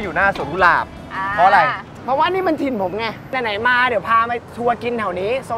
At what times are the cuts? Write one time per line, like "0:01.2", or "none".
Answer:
0:01.9
0:03.3